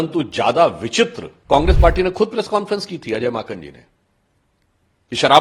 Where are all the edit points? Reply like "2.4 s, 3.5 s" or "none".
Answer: 1.3 s